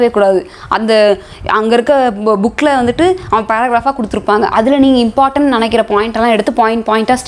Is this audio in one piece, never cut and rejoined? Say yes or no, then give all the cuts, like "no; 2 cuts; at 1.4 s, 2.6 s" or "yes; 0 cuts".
yes; 0 cuts